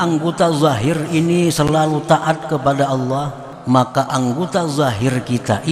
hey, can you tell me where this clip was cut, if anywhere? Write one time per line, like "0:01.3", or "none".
0:03.5